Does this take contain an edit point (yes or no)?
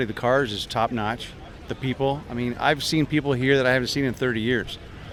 no